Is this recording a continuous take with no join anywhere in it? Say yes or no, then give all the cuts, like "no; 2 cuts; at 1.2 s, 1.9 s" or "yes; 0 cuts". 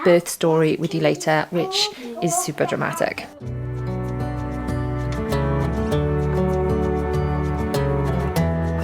yes; 0 cuts